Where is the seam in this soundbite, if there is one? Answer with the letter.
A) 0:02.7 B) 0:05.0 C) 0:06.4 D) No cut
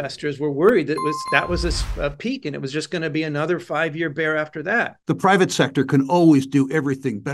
B